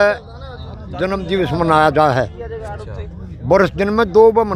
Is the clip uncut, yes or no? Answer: yes